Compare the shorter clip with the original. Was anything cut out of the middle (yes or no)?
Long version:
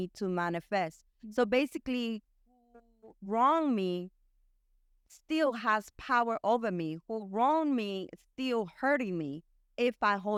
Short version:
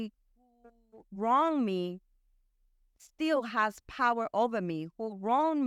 no